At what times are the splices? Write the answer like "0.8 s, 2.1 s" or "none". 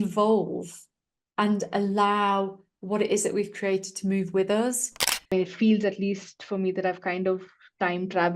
5.3 s